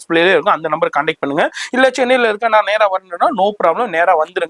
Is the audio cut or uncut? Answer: uncut